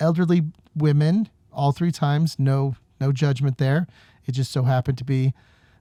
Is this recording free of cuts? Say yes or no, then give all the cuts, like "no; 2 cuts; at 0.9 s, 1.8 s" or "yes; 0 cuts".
yes; 0 cuts